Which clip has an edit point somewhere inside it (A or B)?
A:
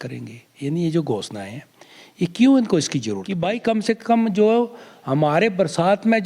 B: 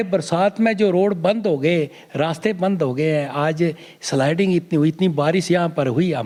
A